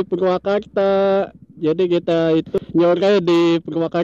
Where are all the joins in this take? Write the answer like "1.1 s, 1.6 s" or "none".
2.6 s